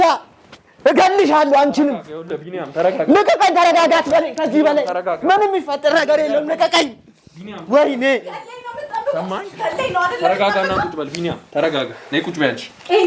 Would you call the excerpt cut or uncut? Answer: uncut